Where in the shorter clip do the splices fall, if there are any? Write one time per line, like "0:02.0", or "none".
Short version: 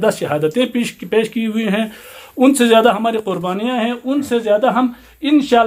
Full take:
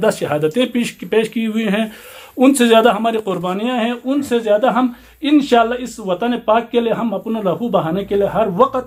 none